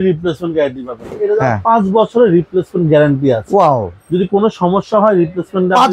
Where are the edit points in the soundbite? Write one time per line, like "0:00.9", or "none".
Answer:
0:01.1

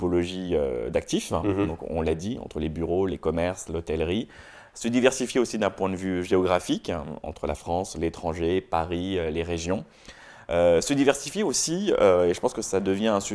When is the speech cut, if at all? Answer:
none

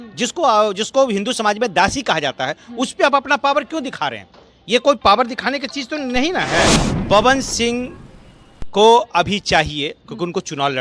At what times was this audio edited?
0:06.9

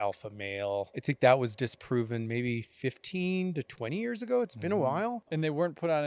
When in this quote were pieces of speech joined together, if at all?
0:00.9
0:05.3

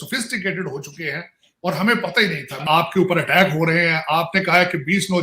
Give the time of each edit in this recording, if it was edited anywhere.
0:02.6

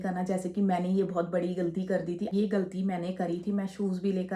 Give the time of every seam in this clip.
0:02.3

